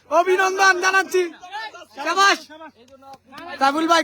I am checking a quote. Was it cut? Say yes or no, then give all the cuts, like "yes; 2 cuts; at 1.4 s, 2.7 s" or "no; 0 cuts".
no; 0 cuts